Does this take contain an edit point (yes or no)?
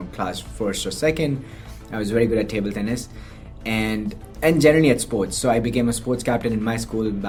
no